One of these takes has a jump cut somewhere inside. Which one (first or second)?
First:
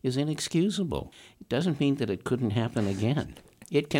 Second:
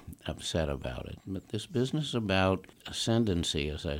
first